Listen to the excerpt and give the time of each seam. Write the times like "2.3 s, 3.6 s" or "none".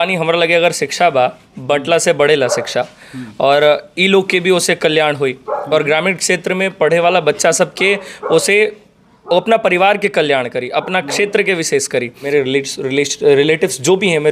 12.2 s